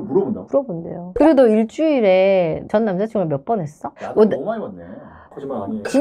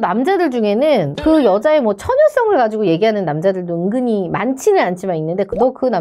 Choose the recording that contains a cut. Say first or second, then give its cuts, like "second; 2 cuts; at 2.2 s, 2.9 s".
first; 3 cuts; at 1.1 s, 3.8 s, 5.1 s